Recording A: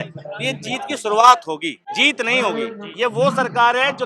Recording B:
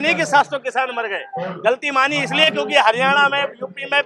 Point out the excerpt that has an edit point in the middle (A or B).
A